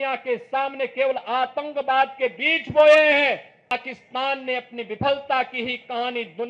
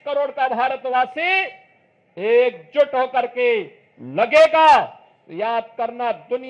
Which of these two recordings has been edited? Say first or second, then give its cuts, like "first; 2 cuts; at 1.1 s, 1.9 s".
first; 1 cut; at 3.7 s